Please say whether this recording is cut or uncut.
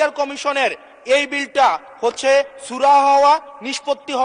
uncut